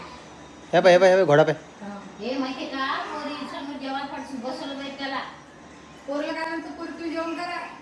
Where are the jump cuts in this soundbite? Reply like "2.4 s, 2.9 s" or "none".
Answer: none